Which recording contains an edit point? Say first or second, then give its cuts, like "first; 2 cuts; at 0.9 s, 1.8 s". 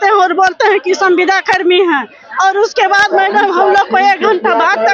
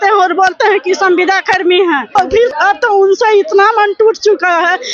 second; 1 cut; at 2.4 s